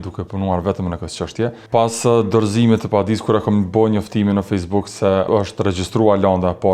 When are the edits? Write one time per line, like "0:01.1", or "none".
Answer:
0:01.6
0:05.3